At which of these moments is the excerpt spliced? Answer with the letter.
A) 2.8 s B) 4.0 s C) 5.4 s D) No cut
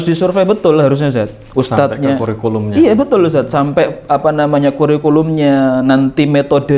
D